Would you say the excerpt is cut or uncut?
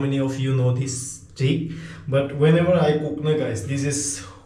uncut